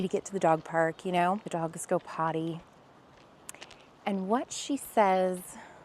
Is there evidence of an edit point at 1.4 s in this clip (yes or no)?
yes